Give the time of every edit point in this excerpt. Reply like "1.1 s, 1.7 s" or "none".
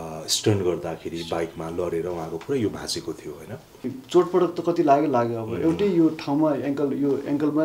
4.0 s